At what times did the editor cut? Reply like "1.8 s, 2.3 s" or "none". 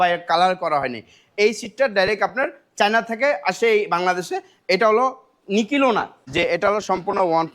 6.2 s